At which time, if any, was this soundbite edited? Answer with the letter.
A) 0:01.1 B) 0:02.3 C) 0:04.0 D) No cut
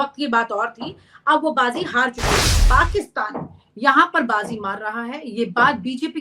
B